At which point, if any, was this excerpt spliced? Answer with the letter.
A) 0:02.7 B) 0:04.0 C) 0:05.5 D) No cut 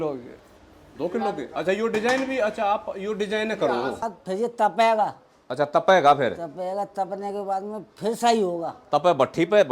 B